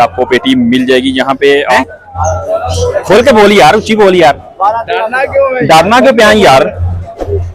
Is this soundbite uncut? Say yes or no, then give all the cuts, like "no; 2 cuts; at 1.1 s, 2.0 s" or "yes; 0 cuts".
yes; 0 cuts